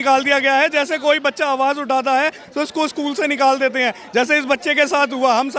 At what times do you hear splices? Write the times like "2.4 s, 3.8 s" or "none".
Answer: none